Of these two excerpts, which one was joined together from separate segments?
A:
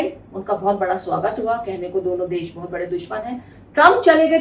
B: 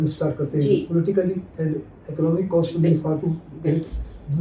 B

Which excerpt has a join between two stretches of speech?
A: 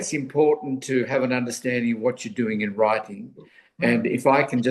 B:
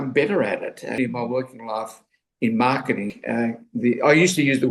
B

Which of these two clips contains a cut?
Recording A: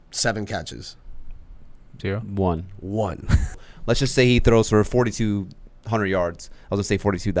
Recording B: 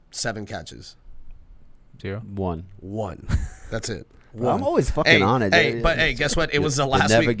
A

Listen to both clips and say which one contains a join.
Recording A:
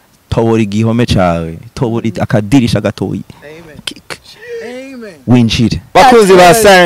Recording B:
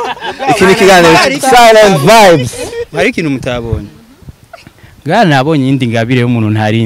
A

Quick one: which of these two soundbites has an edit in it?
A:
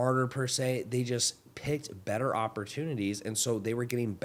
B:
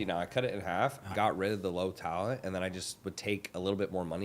B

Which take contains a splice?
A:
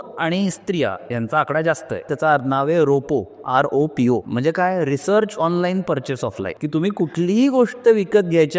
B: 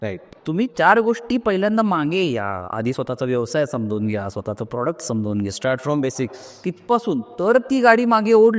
A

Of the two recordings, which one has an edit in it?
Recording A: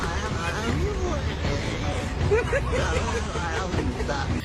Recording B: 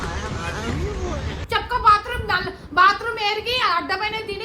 B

